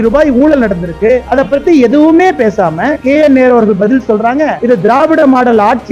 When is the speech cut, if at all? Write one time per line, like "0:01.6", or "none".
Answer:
none